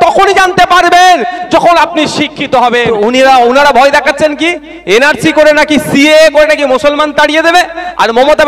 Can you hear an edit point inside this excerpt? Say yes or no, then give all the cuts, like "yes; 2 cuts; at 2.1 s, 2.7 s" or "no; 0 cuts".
yes; 1 cut; at 2.9 s